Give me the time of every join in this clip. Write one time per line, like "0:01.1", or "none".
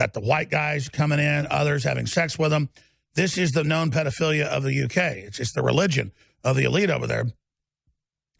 none